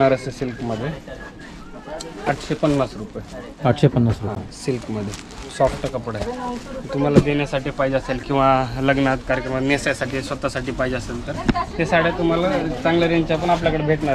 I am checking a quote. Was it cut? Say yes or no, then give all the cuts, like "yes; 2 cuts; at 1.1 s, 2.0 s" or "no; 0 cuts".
no; 0 cuts